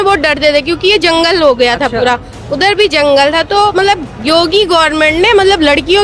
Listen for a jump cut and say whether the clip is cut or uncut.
uncut